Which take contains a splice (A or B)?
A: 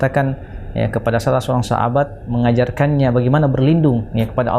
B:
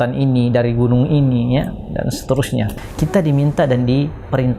B